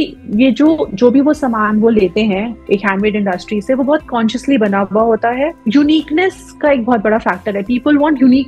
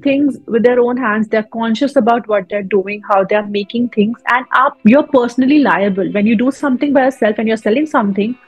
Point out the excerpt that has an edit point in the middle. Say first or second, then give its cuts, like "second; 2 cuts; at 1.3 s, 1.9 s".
first; 1 cut; at 5.6 s